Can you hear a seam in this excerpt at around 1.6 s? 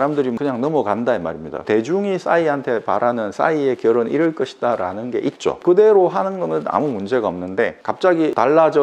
yes; 1 cut; at 1.6 s

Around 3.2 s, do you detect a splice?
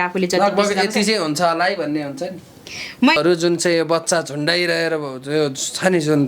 yes; 1 cut; at 3.2 s

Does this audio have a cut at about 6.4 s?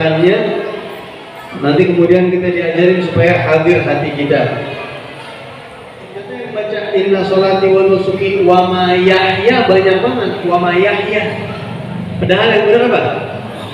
yes; 1 cut; at 6.4 s

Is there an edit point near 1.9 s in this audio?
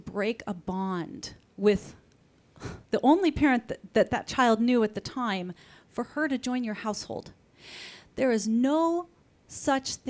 no; 0 cuts

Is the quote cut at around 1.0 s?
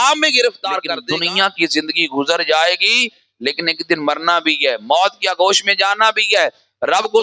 yes; 1 cut; at 1.0 s

